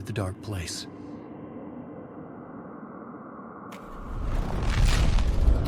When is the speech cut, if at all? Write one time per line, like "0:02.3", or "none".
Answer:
0:01.7